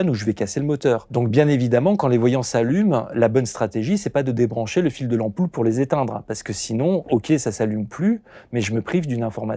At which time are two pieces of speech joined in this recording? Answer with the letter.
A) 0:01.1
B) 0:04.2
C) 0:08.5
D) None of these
A